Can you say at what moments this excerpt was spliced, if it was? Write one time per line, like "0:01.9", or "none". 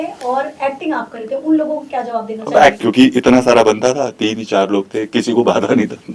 0:02.8

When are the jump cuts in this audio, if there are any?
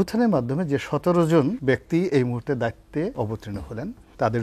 0:01.6
0:03.5

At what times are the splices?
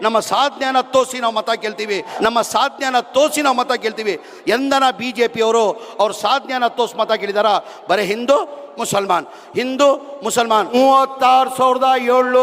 0:02.1
0:10.7

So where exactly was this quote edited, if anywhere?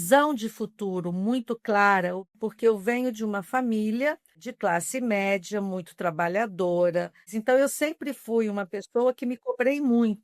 0:02.3
0:04.5
0:07.3

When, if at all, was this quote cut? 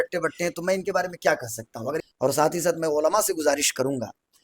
0:02.0

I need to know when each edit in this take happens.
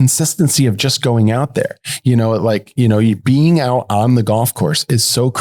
none

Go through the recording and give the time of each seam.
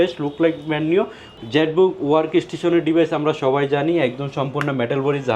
0:01.2

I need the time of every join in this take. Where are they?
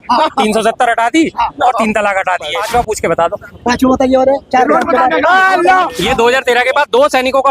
0:02.6
0:05.9

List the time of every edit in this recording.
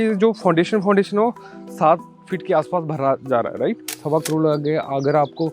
0:03.9

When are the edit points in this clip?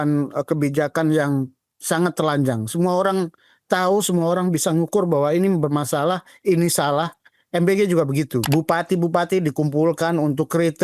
0:08.4

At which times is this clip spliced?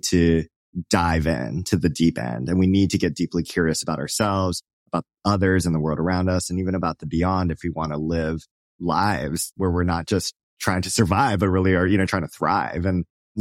0:08.6
0:09.5
0:12.1

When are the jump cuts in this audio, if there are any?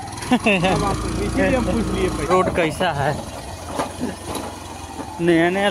0:02.3

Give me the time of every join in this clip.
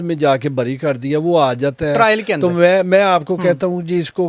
none

